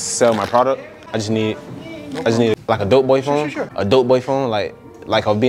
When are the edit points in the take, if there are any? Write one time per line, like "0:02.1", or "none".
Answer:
0:00.9
0:02.6
0:03.6